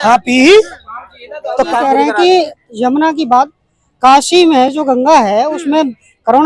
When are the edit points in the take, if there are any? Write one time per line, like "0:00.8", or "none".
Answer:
0:01.7